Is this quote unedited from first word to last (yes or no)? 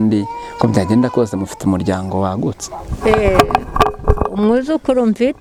yes